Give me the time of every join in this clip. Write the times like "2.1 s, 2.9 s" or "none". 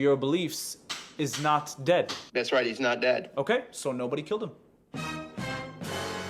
none